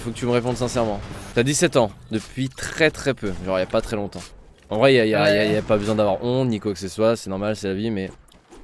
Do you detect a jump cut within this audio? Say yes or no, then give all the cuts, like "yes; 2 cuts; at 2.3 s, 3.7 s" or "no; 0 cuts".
yes; 1 cut; at 1.2 s